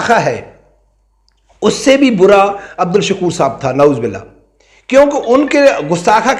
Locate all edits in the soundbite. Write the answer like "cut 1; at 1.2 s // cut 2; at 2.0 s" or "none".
cut 1; at 2.7 s